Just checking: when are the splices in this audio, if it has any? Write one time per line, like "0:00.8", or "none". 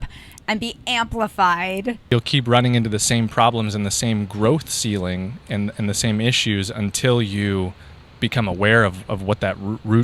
0:02.1